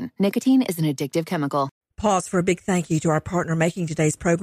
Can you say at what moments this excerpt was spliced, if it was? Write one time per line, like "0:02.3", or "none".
0:01.7